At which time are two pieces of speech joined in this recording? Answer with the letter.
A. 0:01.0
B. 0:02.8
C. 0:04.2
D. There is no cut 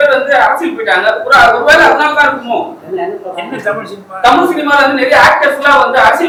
D